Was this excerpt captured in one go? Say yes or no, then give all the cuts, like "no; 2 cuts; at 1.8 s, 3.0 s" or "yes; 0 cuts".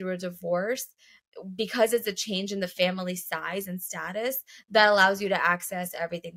yes; 0 cuts